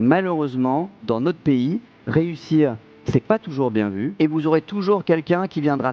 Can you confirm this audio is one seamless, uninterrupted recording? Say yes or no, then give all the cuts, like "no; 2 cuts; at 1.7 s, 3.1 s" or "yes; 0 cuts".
no; 1 cut; at 4.1 s